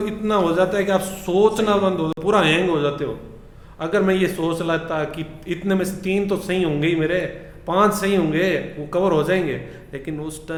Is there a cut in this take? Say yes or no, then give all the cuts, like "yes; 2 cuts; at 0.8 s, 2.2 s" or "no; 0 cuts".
no; 0 cuts